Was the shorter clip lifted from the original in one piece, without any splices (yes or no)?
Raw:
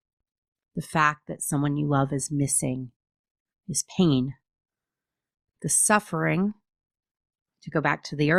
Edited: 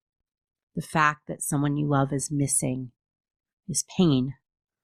yes